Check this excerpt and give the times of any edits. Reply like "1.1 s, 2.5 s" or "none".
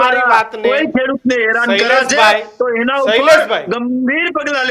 none